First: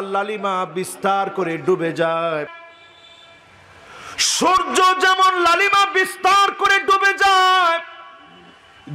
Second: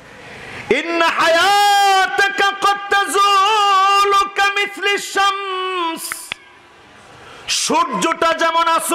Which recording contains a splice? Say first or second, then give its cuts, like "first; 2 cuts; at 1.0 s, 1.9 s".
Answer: first; 1 cut; at 2.7 s